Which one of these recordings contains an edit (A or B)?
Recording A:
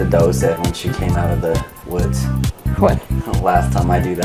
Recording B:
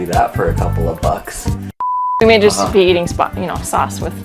B